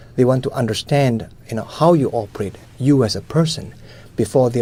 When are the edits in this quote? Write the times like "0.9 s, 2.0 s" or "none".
none